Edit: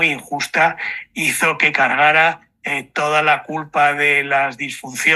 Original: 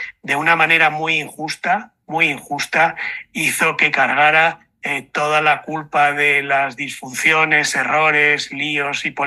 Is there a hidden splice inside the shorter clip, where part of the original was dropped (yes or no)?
no